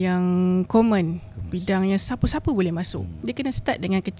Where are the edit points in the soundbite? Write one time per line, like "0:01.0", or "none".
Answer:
0:03.1